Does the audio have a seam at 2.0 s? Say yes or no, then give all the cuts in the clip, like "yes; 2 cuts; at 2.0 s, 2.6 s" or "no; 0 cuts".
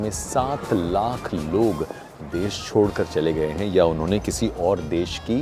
no; 0 cuts